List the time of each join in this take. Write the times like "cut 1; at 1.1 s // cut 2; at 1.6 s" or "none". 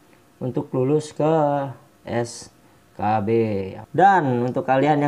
cut 1; at 3.8 s

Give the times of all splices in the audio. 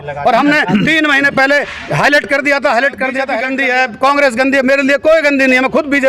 cut 1; at 3.3 s

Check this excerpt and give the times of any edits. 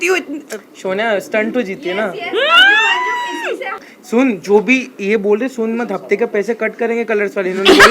none

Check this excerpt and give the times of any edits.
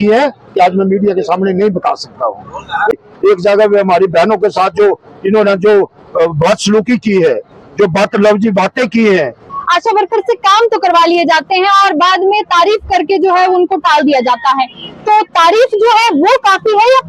cut 1; at 2.9 s // cut 2; at 9.5 s

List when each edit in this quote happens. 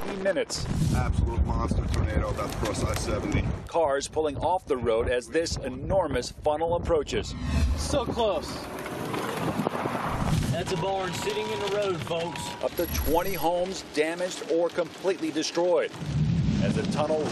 cut 1; at 8.9 s

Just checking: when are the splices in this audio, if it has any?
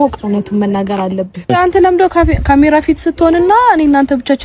cut 1; at 1.5 s

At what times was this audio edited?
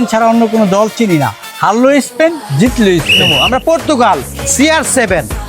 cut 1; at 3.2 s

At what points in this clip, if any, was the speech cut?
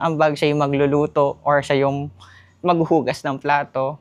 none

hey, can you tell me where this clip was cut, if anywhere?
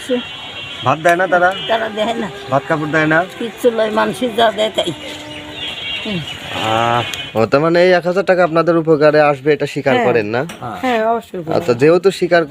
cut 1; at 7.2 s

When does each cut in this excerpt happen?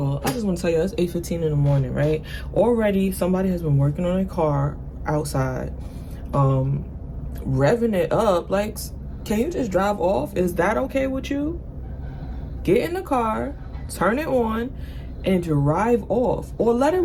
none

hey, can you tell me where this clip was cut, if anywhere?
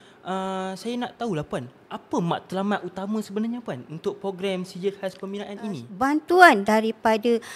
cut 1; at 5.9 s

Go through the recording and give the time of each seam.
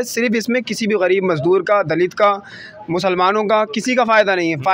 none

